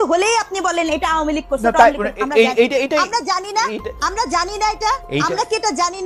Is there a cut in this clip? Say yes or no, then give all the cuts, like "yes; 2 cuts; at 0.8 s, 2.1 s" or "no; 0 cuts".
no; 0 cuts